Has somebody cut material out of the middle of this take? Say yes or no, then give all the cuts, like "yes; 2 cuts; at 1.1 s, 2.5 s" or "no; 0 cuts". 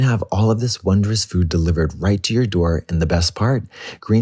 no; 0 cuts